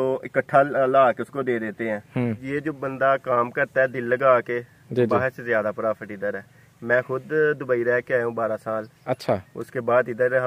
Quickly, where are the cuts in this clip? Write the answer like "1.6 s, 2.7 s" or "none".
2.4 s